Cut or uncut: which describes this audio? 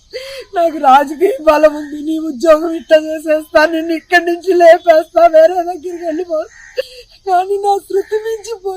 cut